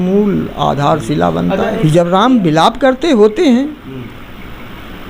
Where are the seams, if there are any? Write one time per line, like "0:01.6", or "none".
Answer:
0:01.8